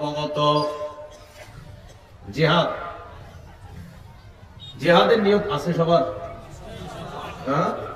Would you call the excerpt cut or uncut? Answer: uncut